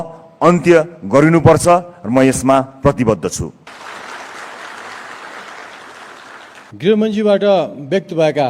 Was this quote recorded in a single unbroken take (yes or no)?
no